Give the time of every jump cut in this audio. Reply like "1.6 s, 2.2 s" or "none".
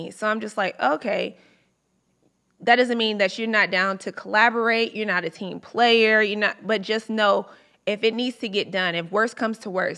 none